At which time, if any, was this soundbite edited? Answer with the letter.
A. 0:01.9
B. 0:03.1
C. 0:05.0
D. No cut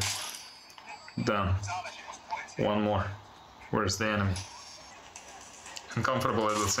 C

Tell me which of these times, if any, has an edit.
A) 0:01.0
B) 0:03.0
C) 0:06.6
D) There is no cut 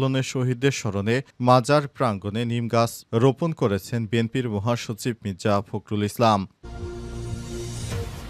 C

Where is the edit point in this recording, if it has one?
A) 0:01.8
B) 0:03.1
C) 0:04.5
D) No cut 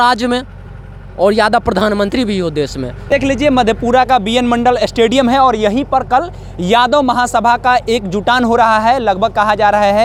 D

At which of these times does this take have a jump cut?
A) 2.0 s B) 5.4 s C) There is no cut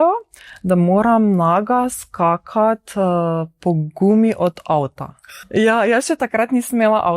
B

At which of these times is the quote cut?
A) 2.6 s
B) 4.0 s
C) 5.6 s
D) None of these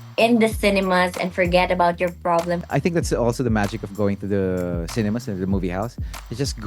A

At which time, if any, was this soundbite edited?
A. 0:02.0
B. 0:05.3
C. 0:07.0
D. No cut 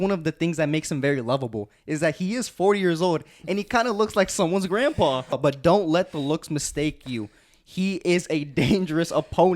B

